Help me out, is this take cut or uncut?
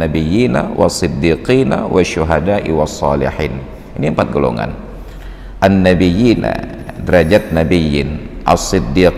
uncut